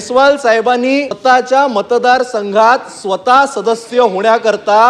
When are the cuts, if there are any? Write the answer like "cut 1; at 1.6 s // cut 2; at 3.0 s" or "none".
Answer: cut 1; at 1.1 s